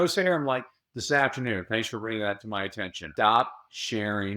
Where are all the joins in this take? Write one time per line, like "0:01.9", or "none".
0:03.0